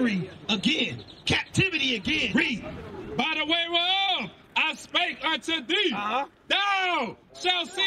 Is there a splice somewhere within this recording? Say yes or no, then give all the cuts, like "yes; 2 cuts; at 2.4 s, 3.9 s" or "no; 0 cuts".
yes; 1 cut; at 2.3 s